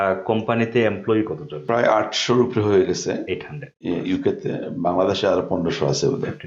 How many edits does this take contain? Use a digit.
0